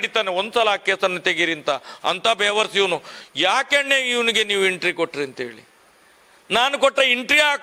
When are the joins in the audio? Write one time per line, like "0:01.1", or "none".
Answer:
none